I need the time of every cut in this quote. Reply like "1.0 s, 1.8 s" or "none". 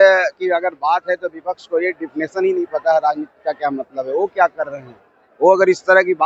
none